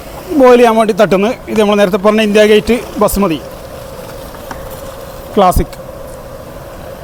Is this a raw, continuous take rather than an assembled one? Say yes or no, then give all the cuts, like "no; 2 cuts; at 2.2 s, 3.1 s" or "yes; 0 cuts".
yes; 0 cuts